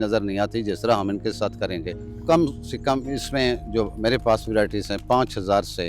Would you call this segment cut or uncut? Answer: cut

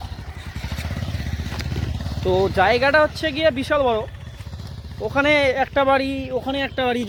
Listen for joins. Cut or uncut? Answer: uncut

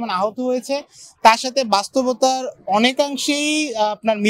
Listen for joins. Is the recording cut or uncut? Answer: uncut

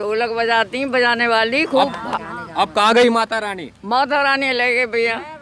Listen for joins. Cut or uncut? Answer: uncut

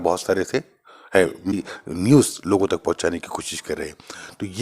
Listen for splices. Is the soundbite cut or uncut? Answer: cut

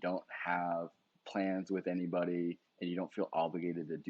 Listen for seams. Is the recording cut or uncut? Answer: cut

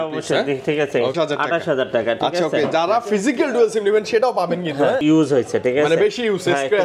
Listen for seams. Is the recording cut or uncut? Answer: cut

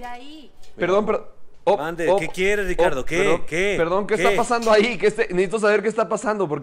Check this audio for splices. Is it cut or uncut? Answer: uncut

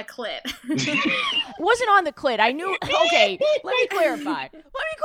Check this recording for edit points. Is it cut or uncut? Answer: uncut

